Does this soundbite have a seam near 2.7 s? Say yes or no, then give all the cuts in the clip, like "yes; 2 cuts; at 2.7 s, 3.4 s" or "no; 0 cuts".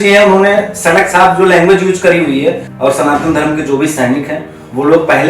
yes; 1 cut; at 2.7 s